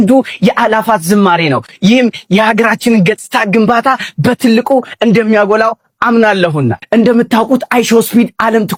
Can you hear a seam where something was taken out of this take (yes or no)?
no